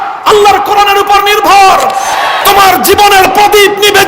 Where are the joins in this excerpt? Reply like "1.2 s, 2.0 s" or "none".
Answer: 2.3 s